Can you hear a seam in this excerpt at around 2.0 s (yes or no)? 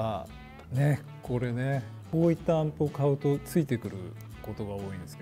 yes